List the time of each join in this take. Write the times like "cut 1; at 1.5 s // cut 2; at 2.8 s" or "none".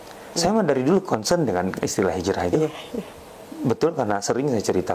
none